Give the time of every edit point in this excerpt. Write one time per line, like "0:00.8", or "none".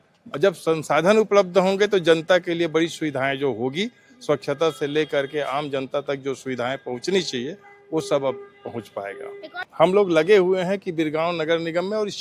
0:09.6

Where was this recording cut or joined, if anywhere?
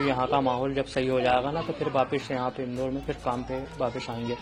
none

